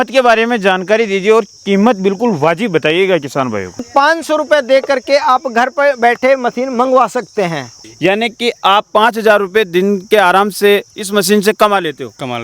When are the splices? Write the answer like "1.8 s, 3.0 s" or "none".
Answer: 3.9 s, 7.7 s